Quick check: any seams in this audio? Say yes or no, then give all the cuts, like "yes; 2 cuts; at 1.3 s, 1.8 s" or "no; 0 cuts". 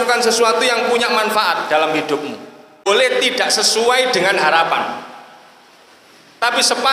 yes; 1 cut; at 2.9 s